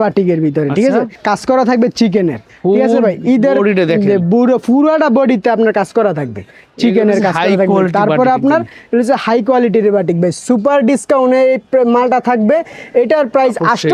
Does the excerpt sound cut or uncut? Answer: uncut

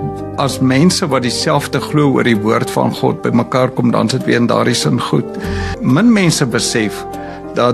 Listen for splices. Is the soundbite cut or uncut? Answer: cut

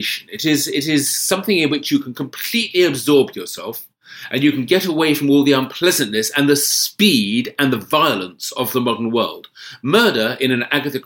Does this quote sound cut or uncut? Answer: uncut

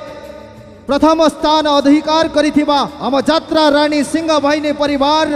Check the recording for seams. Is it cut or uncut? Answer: uncut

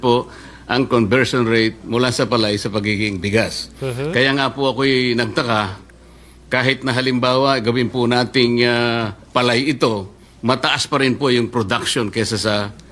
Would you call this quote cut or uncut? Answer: uncut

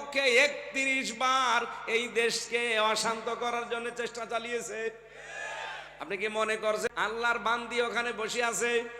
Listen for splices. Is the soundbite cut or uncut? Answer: cut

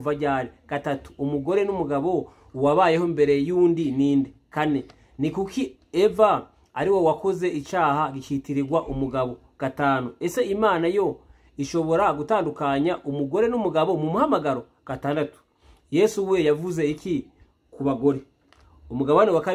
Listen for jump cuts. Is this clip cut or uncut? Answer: uncut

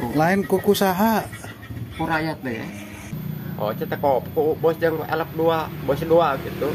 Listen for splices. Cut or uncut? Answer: cut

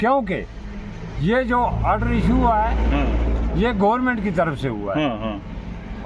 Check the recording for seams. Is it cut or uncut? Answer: uncut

